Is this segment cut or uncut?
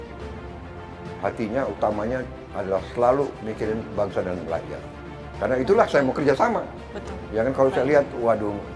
uncut